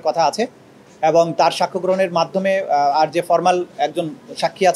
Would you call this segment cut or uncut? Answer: uncut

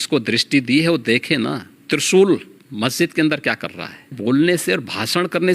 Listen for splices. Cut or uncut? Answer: cut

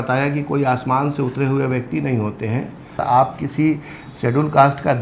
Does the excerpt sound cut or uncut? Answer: cut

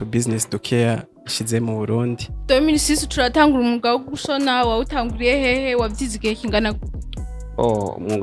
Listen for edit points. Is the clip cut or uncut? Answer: cut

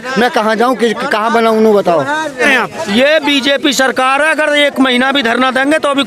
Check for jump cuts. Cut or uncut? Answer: cut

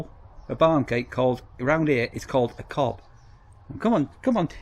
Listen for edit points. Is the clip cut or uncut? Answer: uncut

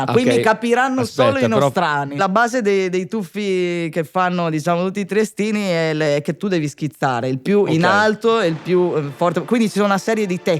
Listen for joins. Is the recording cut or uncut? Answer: cut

